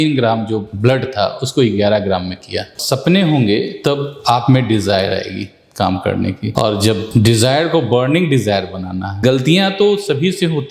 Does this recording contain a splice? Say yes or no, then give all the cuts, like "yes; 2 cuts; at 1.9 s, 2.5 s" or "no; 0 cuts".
yes; 2 cuts; at 2.8 s, 9.2 s